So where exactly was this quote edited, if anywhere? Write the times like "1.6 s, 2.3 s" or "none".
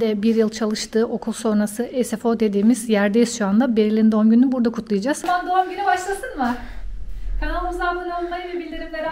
5.2 s